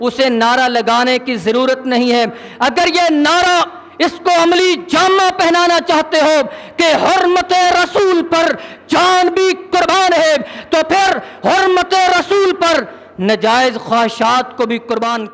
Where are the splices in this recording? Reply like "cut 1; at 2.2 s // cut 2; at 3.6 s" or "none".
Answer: none